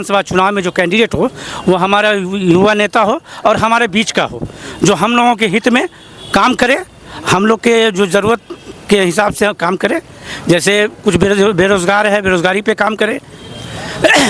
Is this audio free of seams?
yes; 0 cuts

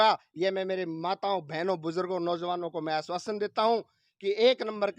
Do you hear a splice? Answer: no; 0 cuts

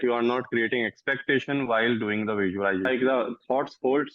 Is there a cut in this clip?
yes; 1 cut; at 2.9 s

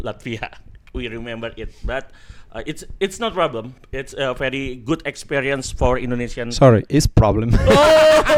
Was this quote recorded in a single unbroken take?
yes; 0 cuts

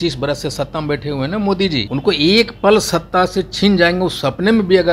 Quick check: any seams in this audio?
yes; 1 cut; at 1.9 s

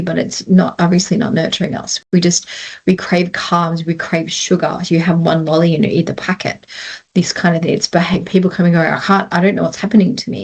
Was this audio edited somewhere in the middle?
no; 0 cuts

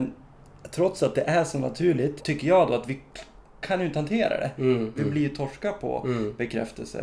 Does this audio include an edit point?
yes; 2 cuts; at 2.2 s, 4.9 s

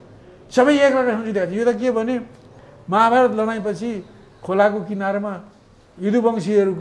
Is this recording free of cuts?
yes; 0 cuts

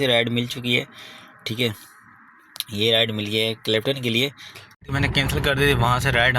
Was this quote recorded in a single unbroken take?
no; 1 cut; at 4.8 s

